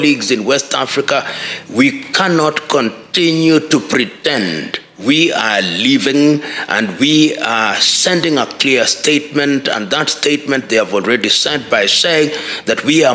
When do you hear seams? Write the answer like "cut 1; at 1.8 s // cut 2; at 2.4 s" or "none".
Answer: none